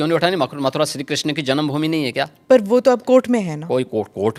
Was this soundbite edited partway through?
no; 0 cuts

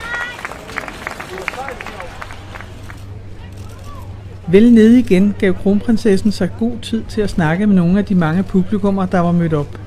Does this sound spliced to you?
no; 0 cuts

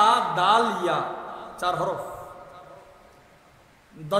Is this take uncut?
yes; 0 cuts

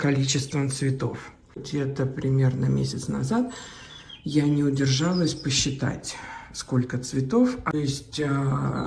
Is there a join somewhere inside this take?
yes; 2 cuts; at 1.6 s, 7.7 s

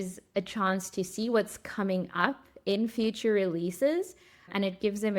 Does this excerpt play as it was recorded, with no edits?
yes; 0 cuts

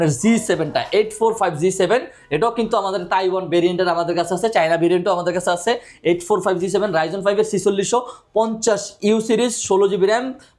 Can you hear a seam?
no; 0 cuts

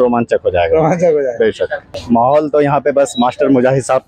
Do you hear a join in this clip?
yes; 1 cut; at 1.9 s

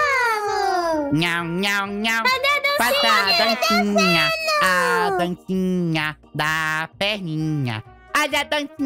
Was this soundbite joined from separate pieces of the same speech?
no; 0 cuts

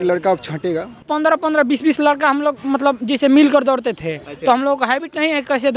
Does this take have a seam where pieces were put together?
yes; 1 cut; at 1.0 s

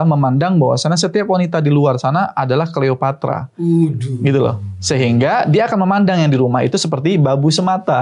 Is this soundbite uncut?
yes; 0 cuts

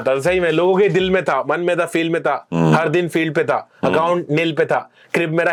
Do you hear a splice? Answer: no; 0 cuts

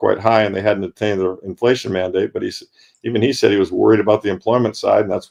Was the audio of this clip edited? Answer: no; 0 cuts

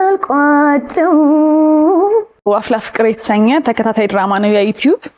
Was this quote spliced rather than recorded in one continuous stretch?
yes; 1 cut; at 2.5 s

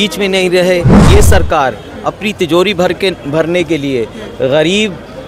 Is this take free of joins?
no; 1 cut; at 1.1 s

